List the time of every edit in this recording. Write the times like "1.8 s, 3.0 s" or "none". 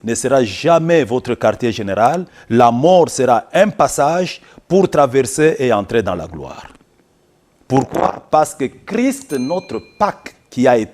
2.3 s